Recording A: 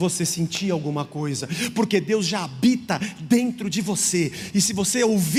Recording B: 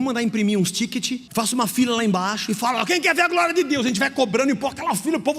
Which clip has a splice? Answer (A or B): B